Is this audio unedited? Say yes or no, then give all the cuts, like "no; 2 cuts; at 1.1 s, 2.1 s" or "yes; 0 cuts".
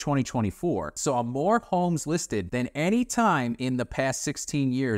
no; 2 cuts; at 0.9 s, 2.5 s